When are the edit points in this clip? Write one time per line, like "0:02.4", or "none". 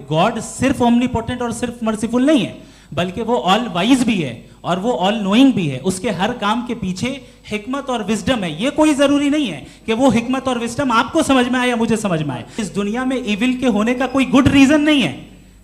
0:12.6